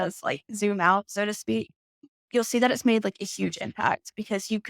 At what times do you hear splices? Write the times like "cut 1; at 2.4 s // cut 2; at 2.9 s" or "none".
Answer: cut 1; at 2.1 s